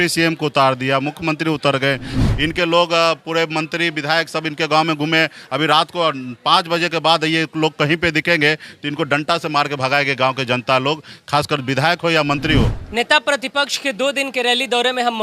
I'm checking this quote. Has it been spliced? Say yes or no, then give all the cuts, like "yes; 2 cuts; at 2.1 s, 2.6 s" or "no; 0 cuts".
yes; 2 cuts; at 2.2 s, 12.8 s